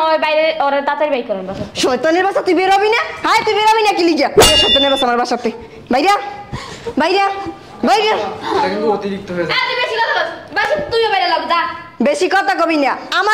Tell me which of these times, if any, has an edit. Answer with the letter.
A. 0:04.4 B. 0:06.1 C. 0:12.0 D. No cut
A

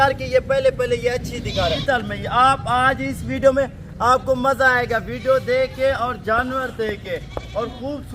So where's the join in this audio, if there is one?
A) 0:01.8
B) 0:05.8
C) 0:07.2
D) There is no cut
A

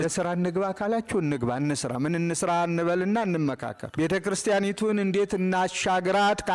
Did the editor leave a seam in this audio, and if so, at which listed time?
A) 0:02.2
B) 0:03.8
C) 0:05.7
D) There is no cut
B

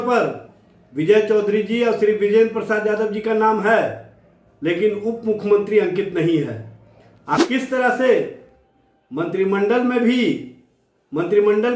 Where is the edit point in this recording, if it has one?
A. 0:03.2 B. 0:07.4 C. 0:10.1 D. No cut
B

